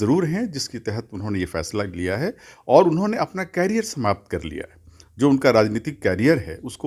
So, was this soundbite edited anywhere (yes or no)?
no